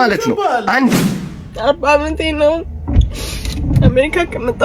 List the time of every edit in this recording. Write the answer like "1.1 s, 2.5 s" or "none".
0.9 s